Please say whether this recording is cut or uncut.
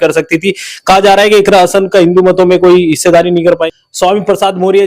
cut